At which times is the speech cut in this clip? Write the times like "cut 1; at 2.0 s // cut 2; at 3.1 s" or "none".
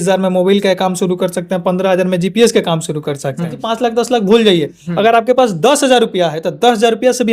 cut 1; at 3.6 s